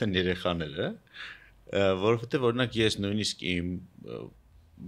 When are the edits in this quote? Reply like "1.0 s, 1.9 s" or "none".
none